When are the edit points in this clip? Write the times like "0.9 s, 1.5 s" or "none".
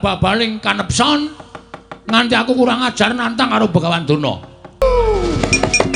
4.8 s